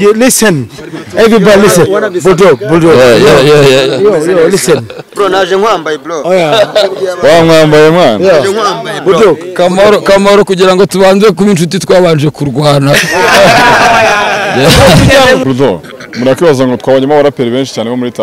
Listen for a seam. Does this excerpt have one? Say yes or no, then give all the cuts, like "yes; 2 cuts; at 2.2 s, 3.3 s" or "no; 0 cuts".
yes; 1 cut; at 15.4 s